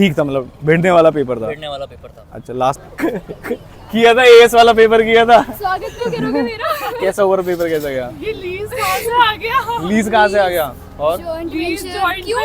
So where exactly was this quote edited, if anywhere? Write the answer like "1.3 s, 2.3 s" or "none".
2.9 s